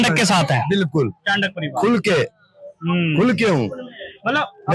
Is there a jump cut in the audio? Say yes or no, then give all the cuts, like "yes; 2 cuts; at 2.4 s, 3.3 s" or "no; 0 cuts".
no; 0 cuts